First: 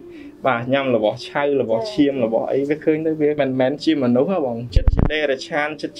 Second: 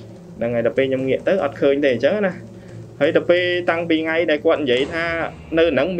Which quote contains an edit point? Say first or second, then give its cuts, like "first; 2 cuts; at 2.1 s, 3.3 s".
first; 2 cuts; at 3.4 s, 4.7 s